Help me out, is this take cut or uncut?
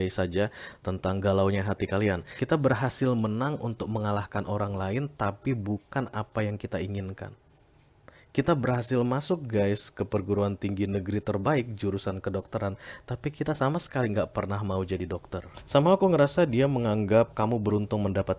cut